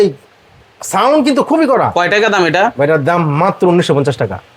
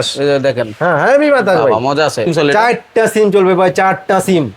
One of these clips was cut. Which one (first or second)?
second